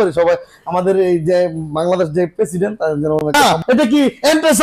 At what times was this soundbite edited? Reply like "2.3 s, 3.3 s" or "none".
3.3 s